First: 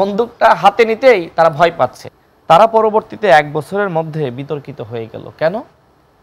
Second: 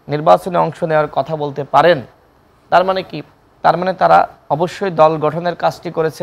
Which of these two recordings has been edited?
first; 1 cut; at 2.0 s

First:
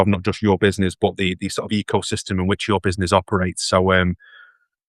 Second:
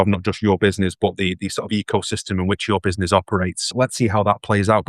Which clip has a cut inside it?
second; 1 cut; at 3.6 s

